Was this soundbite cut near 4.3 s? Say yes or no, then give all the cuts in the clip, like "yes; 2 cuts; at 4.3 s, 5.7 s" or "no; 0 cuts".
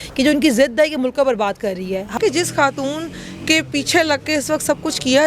no; 1 cut; at 2.1 s